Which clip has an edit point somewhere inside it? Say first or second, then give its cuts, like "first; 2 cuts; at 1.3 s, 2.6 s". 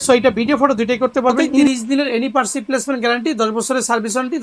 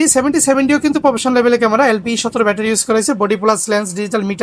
first; 1 cut; at 1.7 s